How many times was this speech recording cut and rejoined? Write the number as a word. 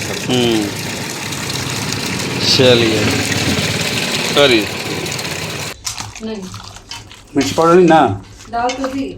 one